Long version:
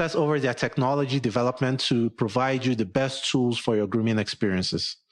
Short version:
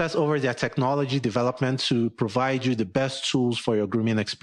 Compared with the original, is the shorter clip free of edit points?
yes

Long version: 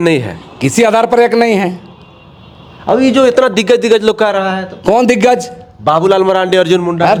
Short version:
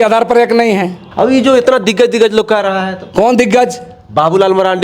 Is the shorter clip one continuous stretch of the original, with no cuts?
no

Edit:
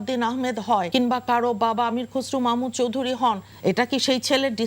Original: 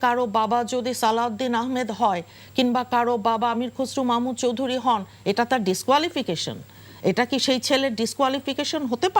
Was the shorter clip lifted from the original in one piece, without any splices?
no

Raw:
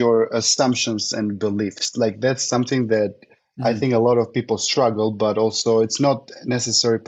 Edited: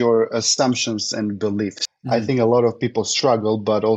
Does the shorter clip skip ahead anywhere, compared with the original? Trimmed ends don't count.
yes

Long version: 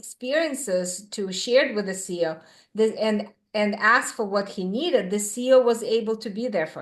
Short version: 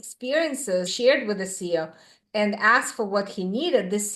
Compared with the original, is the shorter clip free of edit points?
no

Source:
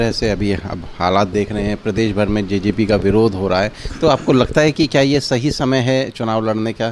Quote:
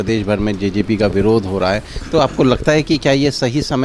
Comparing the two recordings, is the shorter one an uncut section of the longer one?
yes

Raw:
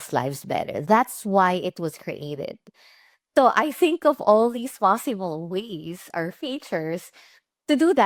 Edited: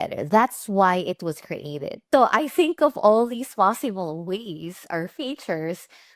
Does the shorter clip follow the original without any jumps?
no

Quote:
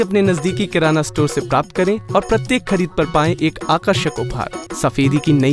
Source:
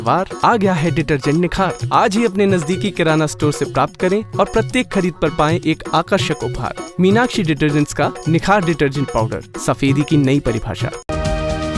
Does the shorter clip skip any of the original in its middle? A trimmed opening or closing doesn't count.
yes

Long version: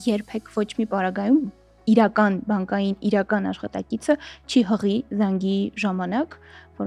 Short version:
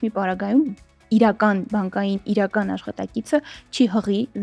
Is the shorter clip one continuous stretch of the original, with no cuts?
yes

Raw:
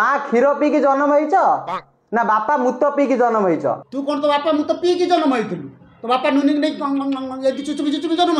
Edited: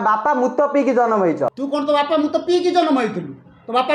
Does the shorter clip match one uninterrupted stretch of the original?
no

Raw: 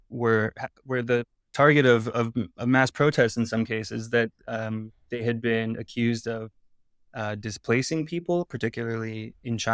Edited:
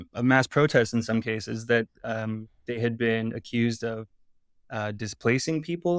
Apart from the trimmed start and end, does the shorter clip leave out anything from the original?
no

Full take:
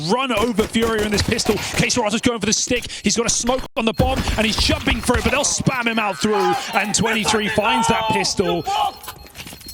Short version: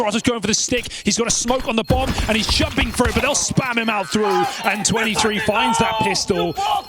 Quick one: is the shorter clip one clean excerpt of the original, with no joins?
no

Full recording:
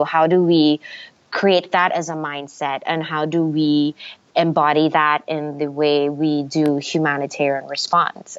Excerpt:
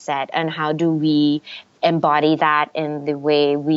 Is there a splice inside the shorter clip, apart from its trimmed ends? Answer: no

